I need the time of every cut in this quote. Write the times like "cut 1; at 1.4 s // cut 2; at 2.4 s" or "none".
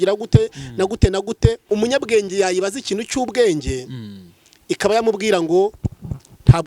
cut 1; at 1.6 s